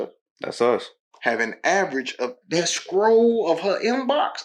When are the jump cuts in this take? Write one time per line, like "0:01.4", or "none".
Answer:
0:02.4